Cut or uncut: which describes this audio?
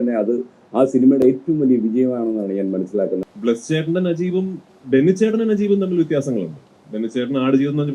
cut